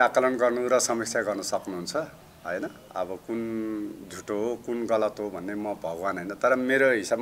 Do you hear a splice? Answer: no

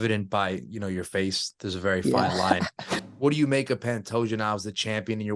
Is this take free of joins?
no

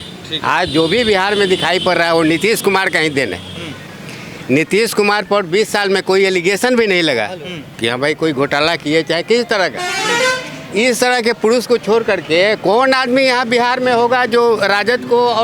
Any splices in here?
no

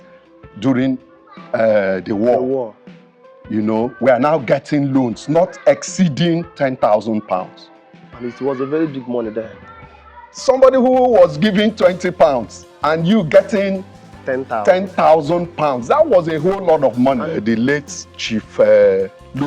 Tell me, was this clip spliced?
yes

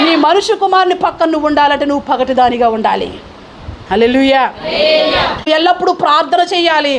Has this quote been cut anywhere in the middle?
yes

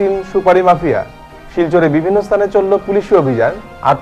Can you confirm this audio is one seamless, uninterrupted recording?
yes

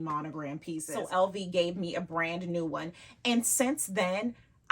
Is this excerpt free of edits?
no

